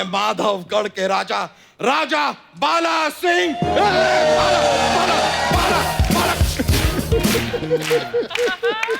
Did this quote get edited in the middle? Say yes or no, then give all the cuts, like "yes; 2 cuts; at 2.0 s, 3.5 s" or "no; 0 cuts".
no; 0 cuts